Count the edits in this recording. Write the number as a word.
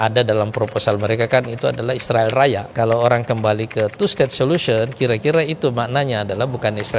one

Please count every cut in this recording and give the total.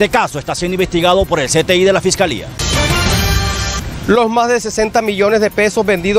two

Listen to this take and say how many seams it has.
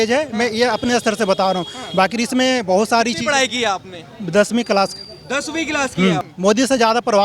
one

